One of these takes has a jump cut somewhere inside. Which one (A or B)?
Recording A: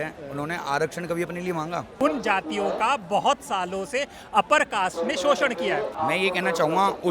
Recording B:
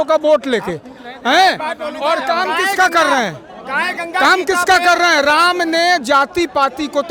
A